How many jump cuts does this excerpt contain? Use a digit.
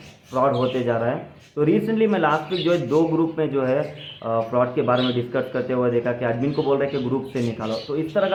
0